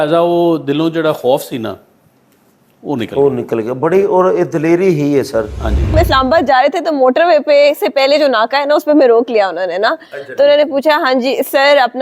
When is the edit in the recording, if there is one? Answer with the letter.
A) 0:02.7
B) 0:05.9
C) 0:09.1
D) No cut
B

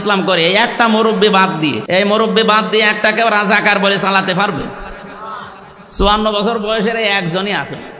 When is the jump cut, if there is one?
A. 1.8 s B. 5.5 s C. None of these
A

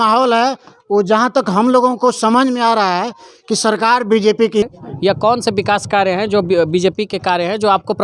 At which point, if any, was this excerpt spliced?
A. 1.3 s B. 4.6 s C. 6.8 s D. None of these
B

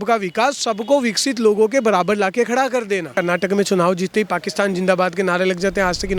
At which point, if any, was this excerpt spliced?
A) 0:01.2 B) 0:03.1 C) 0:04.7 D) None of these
B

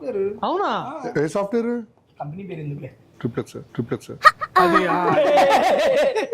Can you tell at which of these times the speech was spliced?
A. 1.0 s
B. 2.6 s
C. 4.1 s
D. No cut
A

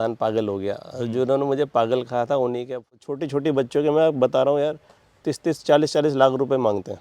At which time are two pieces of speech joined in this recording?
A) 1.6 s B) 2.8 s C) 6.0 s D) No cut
B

